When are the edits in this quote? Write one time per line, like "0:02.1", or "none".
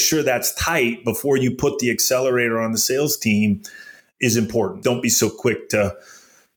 0:04.8